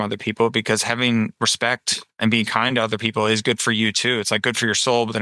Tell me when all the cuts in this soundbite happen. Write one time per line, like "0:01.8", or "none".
0:02.2